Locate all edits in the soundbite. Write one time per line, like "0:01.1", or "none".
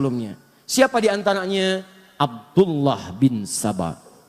none

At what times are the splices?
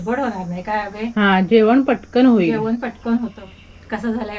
0:03.4

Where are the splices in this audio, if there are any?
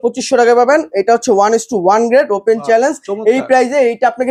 none

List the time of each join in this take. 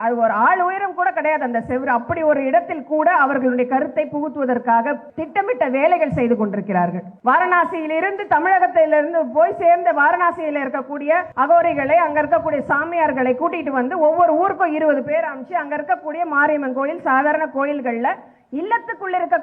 0:05.1
0:07.1
0:11.3

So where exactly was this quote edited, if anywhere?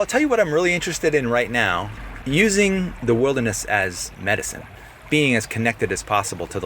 0:02.0
0:02.9
0:04.7

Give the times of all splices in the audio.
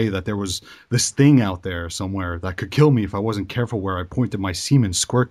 0:02.6

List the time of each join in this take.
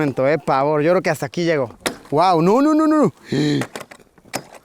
0:01.8

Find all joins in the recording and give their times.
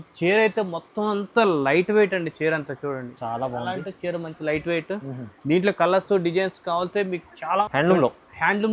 0:07.6

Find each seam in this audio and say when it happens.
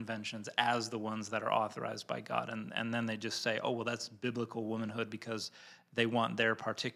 none

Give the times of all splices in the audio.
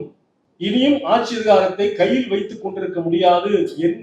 none

